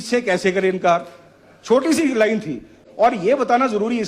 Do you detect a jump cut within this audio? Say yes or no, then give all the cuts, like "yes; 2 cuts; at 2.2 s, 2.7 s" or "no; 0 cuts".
yes; 1 cut; at 2.8 s